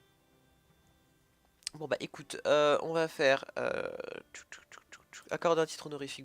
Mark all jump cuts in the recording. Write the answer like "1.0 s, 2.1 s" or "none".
1.1 s

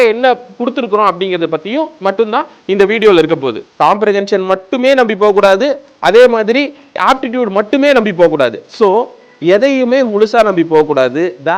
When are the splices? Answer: 3.6 s, 6.9 s

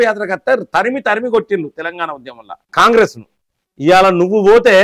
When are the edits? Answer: none

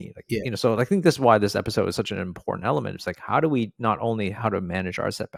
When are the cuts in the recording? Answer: none

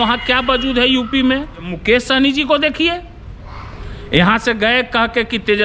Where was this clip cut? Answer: 1.7 s

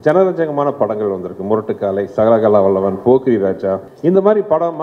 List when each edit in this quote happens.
3.9 s

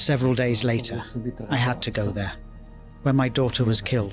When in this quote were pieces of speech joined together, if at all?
none

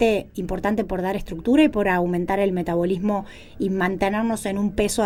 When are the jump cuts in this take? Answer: none

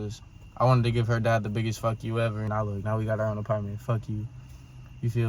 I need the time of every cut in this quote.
2.5 s

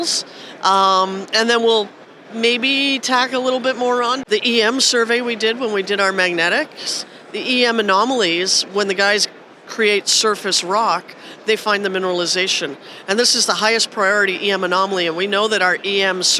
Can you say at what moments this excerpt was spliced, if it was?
4.2 s

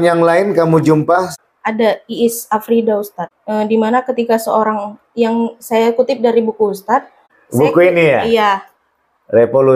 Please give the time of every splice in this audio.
1.4 s, 3.2 s, 7.3 s

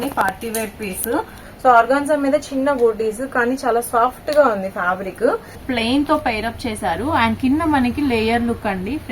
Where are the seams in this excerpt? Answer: 1.4 s, 5.6 s

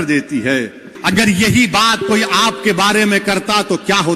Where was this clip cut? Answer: 0.9 s

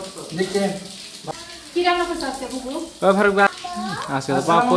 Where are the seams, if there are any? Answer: 1.2 s, 3.5 s

